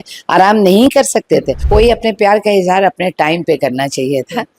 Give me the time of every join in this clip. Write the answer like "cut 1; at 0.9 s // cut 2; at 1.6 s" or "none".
cut 1; at 1.6 s